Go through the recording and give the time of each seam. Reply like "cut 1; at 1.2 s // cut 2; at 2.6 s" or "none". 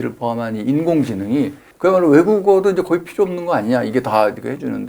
cut 1; at 1.6 s